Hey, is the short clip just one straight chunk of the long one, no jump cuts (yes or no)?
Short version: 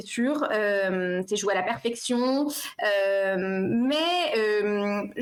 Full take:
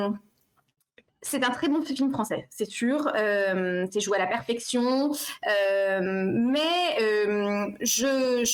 yes